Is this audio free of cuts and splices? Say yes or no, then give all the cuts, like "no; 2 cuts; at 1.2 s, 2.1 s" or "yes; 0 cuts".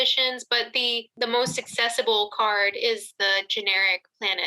no; 1 cut; at 1.1 s